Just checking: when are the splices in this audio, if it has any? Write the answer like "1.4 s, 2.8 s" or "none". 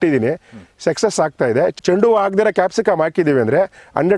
1.7 s